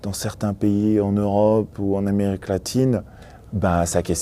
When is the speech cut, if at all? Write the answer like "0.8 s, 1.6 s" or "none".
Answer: 3.2 s

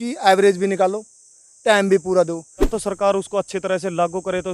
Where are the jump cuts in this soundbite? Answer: 2.7 s

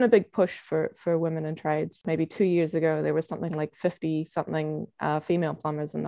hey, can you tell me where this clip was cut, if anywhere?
2.0 s

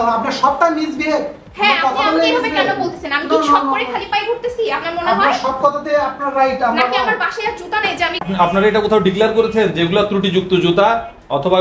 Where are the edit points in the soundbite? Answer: 8.3 s

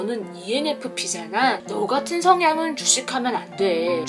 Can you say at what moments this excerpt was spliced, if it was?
1.6 s

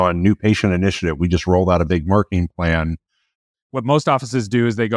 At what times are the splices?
3.5 s

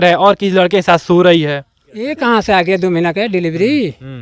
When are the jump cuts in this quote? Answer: 2.1 s

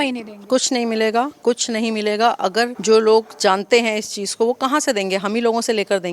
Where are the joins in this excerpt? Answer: 2.8 s

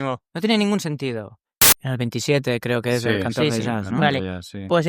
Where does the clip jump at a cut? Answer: 1.7 s

